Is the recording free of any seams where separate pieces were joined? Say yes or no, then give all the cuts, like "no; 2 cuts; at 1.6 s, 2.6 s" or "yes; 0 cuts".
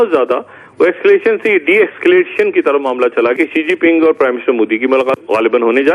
no; 2 cuts; at 3.4 s, 5.2 s